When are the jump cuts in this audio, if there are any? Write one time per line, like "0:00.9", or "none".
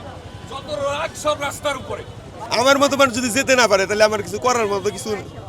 0:02.4